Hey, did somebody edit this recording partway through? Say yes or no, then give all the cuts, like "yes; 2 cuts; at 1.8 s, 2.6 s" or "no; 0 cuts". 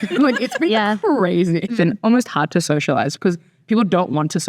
yes; 1 cut; at 1.7 s